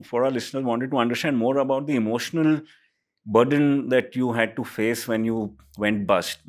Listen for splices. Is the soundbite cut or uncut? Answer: uncut